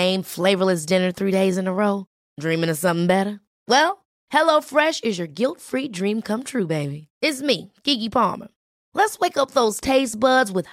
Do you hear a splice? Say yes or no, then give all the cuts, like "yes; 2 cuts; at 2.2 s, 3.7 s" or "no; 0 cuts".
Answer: no; 0 cuts